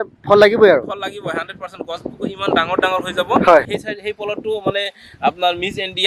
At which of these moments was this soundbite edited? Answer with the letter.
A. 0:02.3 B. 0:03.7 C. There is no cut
B